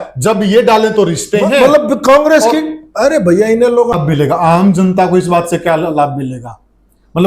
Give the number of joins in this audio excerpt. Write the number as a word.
one